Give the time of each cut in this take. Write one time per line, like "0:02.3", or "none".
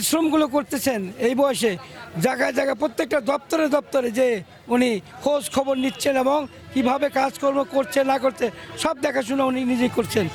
none